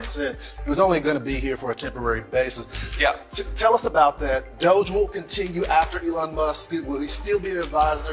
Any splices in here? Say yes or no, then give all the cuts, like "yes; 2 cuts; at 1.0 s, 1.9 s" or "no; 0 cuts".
no; 0 cuts